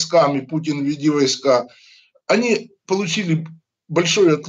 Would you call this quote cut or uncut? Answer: uncut